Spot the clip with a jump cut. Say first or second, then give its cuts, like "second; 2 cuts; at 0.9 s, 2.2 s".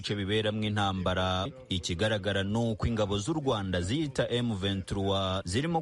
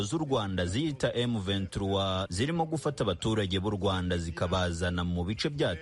first; 1 cut; at 1.6 s